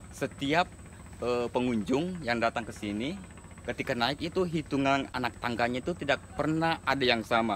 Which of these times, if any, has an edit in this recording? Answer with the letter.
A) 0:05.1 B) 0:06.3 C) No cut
A